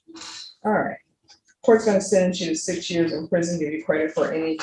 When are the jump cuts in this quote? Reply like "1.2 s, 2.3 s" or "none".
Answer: none